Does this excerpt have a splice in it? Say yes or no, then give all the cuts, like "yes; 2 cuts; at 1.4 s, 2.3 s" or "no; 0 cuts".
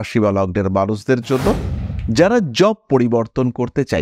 yes; 1 cut; at 1.7 s